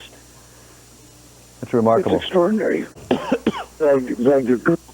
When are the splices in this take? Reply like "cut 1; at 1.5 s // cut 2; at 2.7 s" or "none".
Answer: cut 1; at 3.0 s